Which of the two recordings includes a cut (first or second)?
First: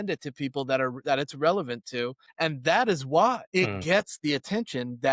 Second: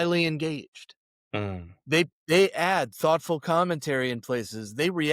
first